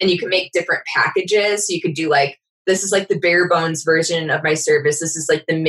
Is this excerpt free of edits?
yes; 0 cuts

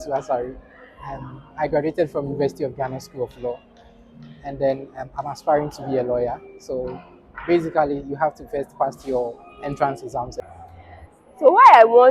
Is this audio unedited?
no; 1 cut; at 10.4 s

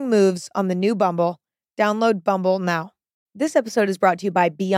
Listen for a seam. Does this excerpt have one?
yes; 1 cut; at 3.2 s

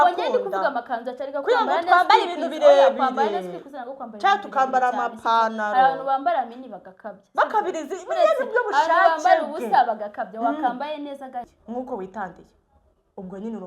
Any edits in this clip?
yes; 1 cut; at 11.5 s

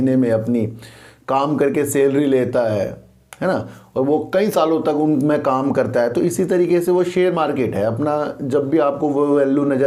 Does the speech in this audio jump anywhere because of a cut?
no; 0 cuts

